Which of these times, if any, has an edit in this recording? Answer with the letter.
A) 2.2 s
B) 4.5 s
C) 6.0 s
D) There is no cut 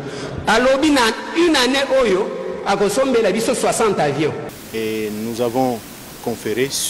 B